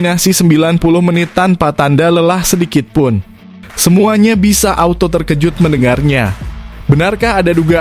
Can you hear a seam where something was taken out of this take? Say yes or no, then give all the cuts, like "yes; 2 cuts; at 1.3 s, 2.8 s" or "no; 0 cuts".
no; 0 cuts